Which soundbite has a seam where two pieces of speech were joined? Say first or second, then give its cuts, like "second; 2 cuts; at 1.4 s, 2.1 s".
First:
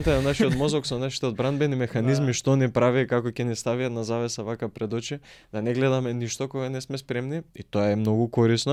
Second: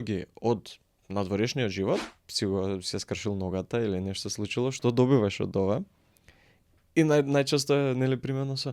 second; 1 cut; at 2.1 s